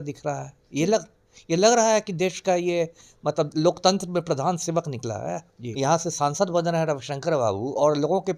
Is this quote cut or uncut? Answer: cut